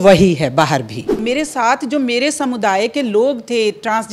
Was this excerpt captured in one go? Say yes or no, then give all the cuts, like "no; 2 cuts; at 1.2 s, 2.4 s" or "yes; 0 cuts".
no; 1 cut; at 1.2 s